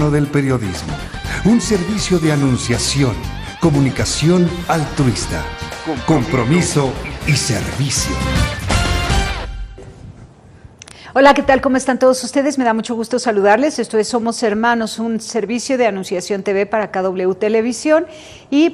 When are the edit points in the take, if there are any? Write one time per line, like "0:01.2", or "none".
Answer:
none

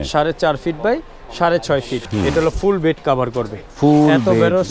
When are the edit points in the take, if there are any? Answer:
0:02.0

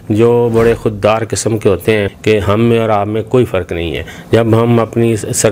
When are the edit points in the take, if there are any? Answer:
0:02.1

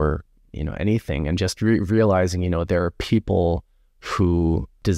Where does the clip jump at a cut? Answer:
none

